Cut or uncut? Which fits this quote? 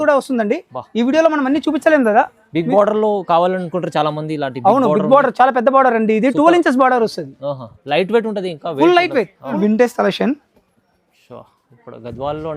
cut